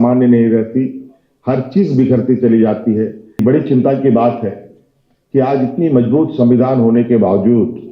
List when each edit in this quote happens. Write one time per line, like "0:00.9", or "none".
0:03.4